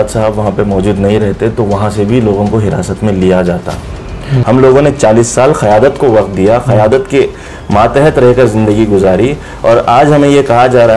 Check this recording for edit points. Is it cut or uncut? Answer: cut